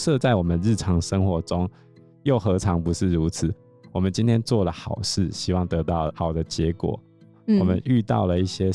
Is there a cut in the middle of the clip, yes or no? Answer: no